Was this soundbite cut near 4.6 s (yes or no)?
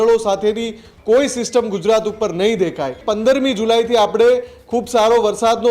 no